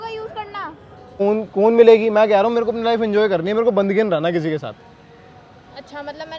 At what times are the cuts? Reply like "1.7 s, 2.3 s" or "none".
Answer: 1.2 s

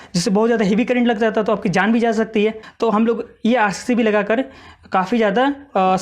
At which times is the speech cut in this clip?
2.7 s

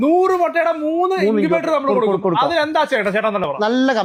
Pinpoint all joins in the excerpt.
none

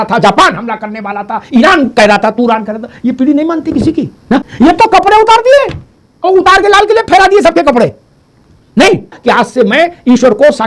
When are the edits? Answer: 4.5 s, 9.2 s

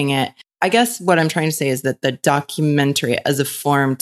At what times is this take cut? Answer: none

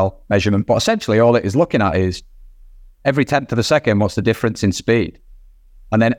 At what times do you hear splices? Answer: none

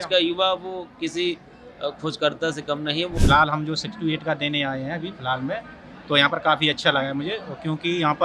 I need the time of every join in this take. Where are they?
3.1 s

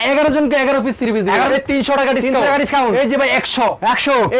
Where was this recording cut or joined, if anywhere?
1.5 s

